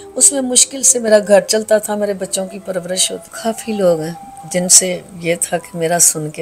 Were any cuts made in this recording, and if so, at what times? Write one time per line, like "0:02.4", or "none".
0:03.3